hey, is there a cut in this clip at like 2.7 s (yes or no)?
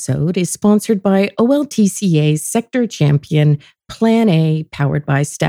no